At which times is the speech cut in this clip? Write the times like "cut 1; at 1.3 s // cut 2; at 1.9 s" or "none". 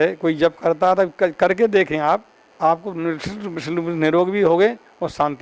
none